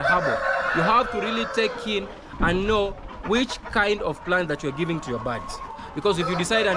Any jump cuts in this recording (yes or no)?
no